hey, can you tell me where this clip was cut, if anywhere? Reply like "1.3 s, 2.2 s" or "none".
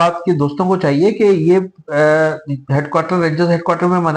none